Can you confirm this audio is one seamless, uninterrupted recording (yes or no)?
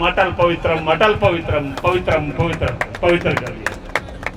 yes